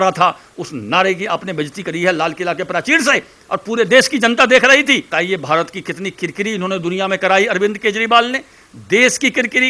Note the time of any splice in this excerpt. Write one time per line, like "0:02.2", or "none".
0:05.1